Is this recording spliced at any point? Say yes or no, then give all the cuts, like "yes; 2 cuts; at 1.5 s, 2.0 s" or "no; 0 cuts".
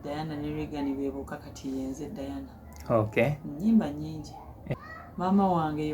yes; 1 cut; at 4.7 s